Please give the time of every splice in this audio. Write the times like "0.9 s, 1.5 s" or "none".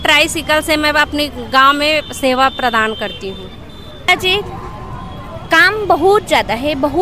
4.1 s